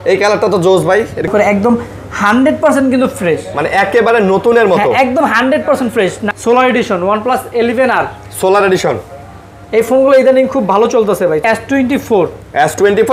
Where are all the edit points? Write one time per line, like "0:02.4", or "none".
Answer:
0:01.3
0:06.3
0:11.4